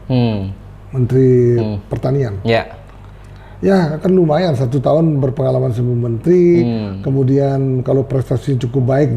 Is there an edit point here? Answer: no; 0 cuts

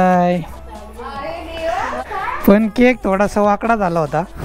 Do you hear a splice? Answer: yes; 1 cut; at 2.0 s

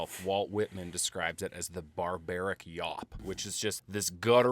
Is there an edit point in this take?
yes; 1 cut; at 3.1 s

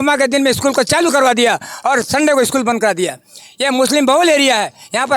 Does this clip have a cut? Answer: no; 0 cuts

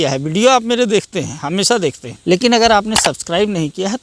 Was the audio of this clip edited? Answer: yes; 1 cut; at 2.1 s

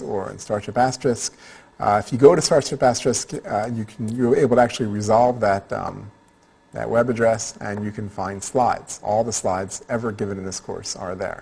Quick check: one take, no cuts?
no; 1 cut; at 2.0 s

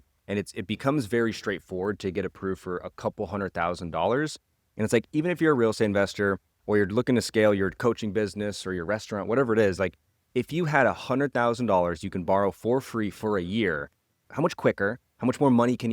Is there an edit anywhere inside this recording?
yes; 1 cut; at 14.2 s

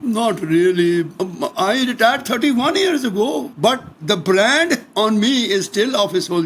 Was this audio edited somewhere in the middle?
yes; 2 cuts; at 1.1 s, 3.5 s

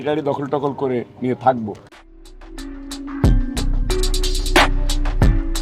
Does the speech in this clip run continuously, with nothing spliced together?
yes; 0 cuts

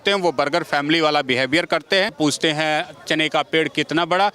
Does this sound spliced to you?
yes; 1 cut; at 2.1 s

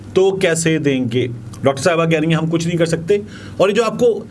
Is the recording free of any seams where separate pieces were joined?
yes; 0 cuts

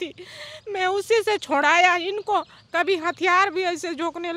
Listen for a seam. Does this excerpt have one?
no; 0 cuts

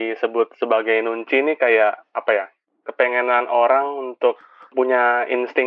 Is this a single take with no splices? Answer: no; 1 cut; at 4.7 s

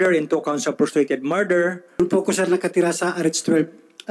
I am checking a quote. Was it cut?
yes; 1 cut; at 2.0 s

